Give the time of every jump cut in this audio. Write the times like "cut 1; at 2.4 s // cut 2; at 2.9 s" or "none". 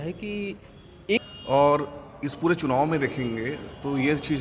cut 1; at 1.2 s